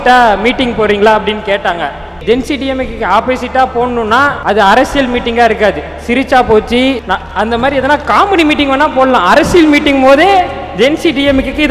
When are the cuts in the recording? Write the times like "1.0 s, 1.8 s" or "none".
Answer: 2.2 s, 4.4 s, 7.0 s